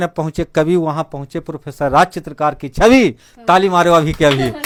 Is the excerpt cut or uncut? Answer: uncut